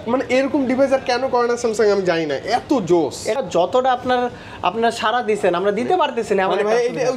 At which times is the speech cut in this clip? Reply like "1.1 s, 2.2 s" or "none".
3.4 s